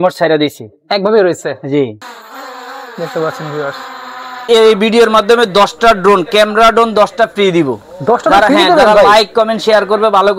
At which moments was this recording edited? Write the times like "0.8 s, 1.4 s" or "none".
4.4 s